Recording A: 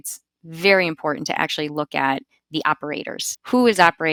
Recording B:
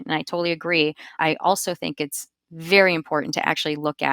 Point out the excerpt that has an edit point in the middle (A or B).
B